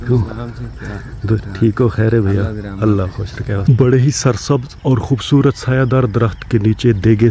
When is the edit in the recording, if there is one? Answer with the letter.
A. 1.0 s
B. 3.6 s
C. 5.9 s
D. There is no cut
B